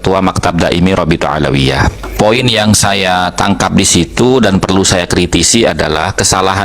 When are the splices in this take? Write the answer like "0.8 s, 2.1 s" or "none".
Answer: 2.1 s